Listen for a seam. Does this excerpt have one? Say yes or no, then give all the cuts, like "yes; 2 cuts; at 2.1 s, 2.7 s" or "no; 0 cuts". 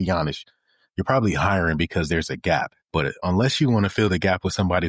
yes; 1 cut; at 3.1 s